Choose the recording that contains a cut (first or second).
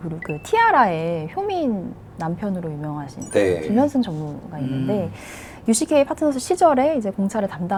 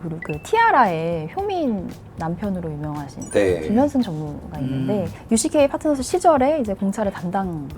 second